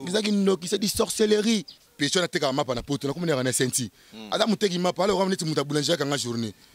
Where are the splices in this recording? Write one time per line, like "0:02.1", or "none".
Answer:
0:01.8